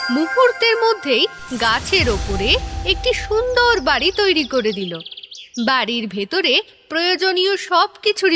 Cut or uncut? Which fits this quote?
uncut